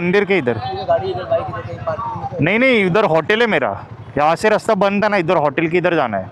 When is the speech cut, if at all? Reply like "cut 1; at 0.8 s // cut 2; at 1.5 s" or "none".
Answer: none